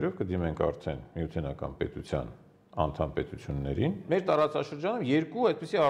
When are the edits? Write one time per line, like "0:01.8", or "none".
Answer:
0:04.0